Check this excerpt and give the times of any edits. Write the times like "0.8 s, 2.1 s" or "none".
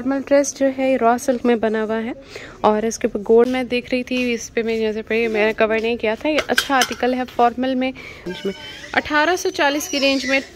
3.5 s, 8.2 s